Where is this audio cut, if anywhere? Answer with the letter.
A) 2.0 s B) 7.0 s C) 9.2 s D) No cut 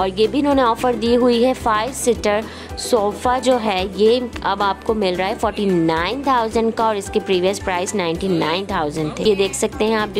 C